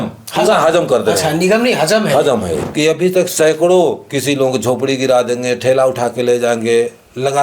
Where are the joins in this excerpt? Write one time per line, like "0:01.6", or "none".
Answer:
0:02.6